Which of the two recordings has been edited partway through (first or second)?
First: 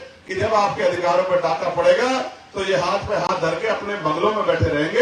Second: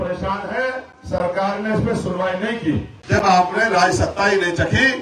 second